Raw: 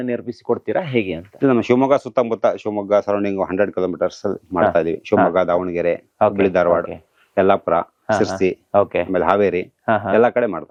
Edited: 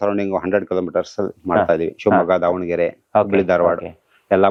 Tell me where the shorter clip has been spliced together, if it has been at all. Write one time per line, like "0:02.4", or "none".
none